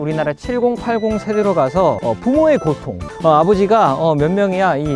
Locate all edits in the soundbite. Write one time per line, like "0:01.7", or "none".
0:02.0
0:03.1